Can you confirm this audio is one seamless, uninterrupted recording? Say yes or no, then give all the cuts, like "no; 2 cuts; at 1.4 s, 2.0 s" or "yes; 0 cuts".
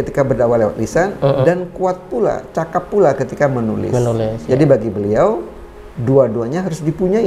yes; 0 cuts